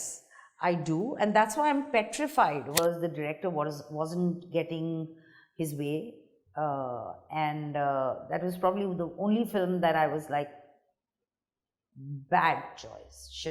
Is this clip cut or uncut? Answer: cut